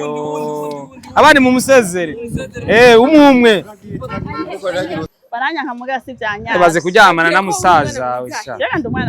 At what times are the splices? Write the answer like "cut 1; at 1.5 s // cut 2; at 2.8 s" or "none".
cut 1; at 5.1 s